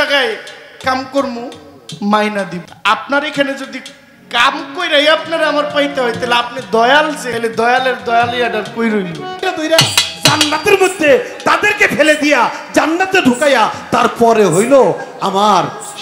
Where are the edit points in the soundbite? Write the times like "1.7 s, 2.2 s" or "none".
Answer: 2.7 s, 7.2 s, 9.4 s